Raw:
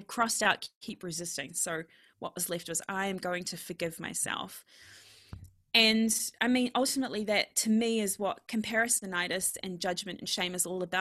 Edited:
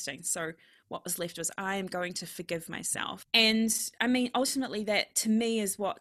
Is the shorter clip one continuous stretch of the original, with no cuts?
no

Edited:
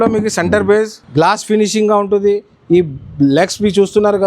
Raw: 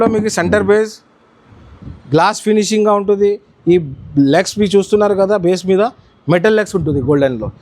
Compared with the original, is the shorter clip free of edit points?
no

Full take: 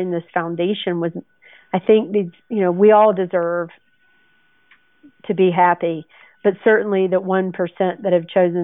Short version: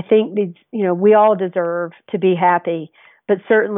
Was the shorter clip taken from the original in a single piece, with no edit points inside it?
no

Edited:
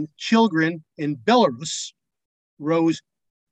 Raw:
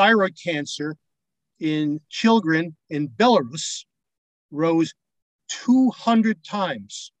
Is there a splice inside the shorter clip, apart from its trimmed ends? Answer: no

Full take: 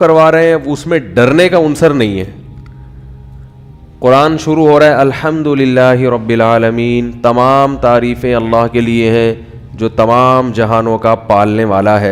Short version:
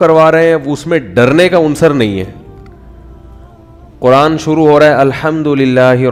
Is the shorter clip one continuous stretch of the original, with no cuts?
yes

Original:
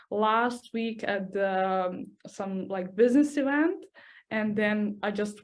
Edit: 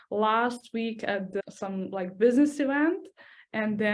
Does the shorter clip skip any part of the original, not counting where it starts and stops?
yes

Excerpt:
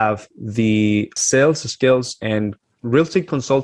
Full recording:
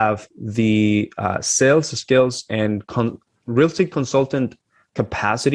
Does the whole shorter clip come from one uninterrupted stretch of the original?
no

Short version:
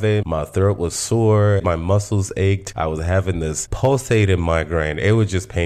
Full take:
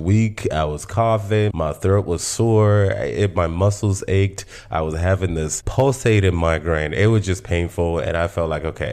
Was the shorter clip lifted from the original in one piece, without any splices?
no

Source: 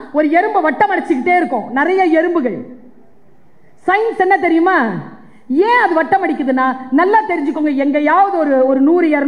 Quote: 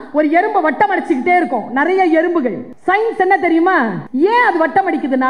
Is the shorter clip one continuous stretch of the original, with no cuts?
no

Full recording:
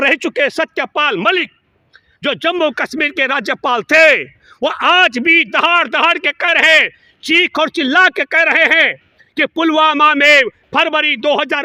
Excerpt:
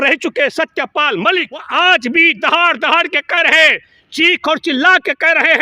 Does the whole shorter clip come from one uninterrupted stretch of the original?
no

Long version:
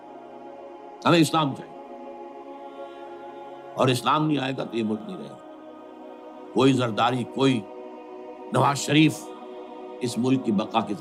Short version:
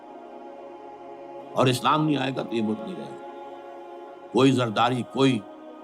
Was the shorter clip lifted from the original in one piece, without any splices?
no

